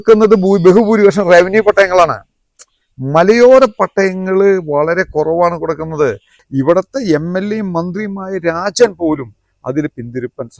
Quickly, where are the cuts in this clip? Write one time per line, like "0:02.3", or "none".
0:06.3